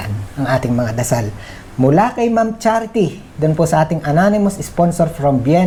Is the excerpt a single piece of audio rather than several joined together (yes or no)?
yes